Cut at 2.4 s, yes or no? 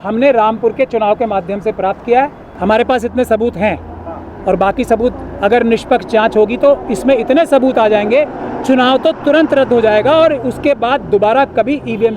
yes